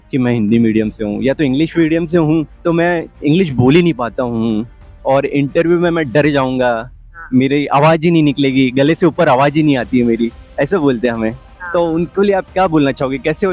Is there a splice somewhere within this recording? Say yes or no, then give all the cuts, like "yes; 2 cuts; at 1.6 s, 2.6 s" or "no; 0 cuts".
no; 0 cuts